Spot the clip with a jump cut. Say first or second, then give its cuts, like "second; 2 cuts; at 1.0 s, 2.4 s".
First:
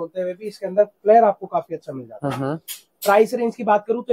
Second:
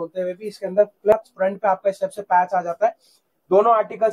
second; 1 cut; at 1.1 s